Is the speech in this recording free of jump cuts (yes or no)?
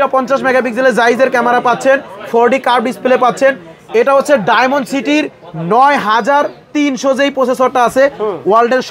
yes